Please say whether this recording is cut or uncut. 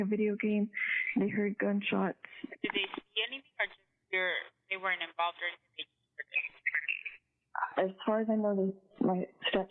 uncut